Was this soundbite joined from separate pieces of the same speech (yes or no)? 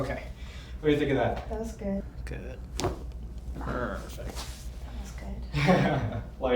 yes